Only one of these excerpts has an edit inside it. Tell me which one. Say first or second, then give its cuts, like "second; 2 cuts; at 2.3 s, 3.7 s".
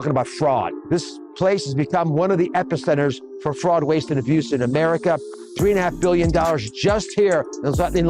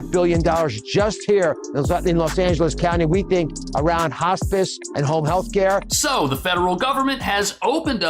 first; 1 cut; at 2.5 s